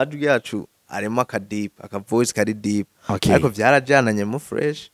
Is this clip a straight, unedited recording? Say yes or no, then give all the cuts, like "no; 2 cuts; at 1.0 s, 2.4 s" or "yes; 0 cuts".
yes; 0 cuts